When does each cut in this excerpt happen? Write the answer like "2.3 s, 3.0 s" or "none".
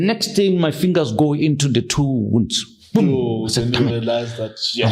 none